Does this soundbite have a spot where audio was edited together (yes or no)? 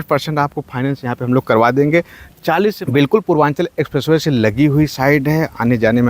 yes